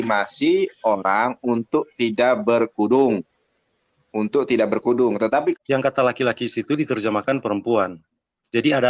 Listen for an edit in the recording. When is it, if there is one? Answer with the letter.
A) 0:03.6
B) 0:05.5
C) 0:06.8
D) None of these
B